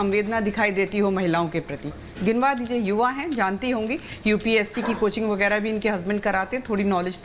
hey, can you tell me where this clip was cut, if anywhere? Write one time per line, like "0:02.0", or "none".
none